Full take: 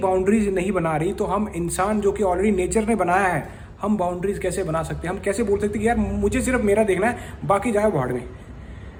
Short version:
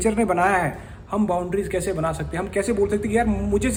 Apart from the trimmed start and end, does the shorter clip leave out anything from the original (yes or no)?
no